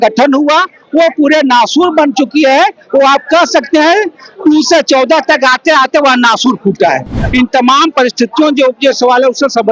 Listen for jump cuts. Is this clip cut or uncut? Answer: cut